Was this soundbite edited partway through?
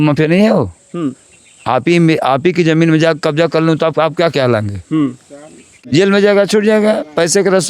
yes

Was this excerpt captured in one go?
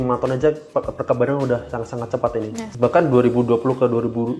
no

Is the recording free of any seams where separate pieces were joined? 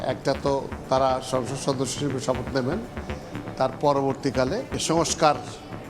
no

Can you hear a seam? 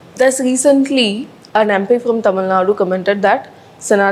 no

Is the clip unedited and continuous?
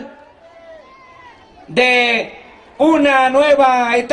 no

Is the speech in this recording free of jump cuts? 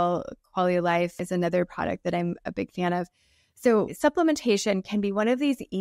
no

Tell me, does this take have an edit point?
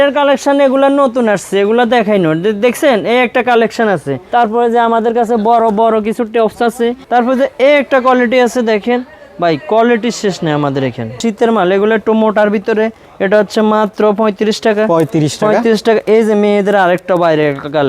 yes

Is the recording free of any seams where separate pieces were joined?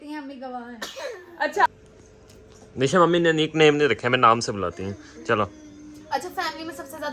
no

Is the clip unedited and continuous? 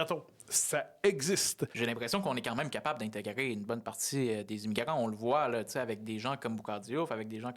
no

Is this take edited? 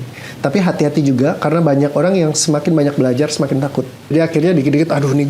yes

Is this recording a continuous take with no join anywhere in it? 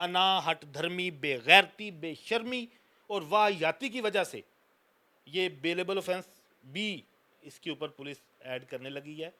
yes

